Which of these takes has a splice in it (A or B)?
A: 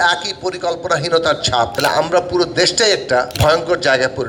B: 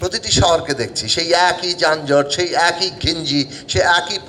A